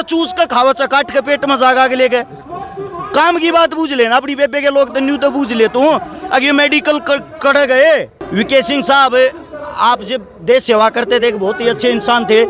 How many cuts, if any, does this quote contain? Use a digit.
1